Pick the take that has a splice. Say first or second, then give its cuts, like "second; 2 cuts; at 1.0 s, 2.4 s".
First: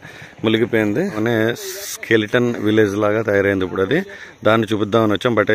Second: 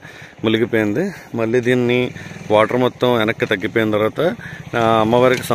first; 1 cut; at 1.2 s